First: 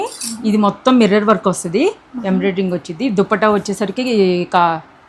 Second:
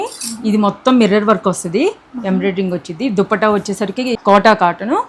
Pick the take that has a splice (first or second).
second